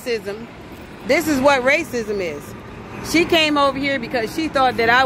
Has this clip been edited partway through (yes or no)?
no